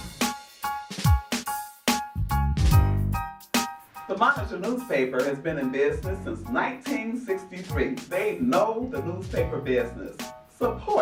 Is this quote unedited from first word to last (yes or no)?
yes